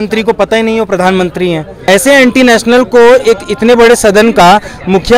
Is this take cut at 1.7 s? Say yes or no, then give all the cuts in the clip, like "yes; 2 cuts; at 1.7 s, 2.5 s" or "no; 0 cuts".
yes; 1 cut; at 1.7 s